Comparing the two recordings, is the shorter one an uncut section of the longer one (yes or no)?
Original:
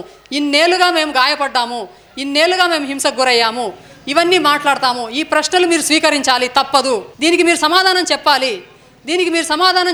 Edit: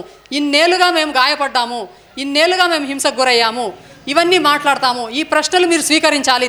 yes